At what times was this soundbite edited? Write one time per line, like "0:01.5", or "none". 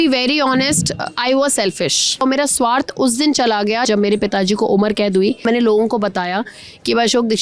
0:02.2
0:03.9
0:05.4

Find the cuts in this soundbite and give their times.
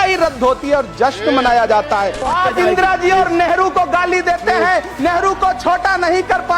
0:02.2

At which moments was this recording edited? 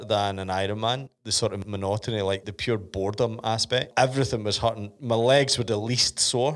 0:01.3
0:02.4
0:03.9

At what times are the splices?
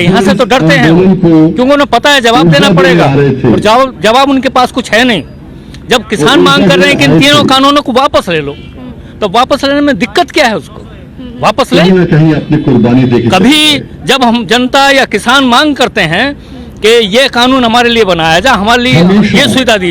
none

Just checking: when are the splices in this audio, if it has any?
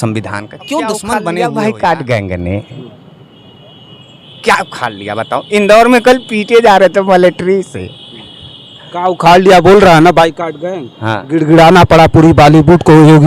0:01.4

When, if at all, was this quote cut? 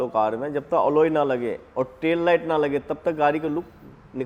none

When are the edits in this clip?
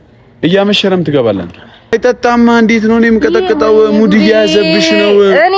0:01.9

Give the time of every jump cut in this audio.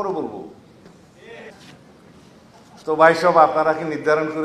0:01.5

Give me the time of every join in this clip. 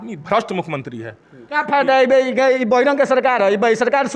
0:01.5

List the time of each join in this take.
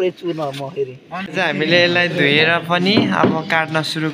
0:01.3

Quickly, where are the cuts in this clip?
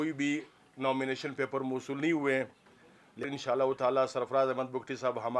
0:03.2

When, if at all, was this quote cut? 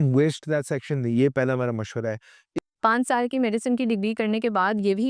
0:02.5

